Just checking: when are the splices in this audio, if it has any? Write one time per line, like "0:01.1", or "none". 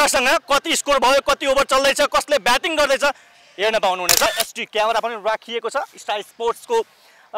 0:04.3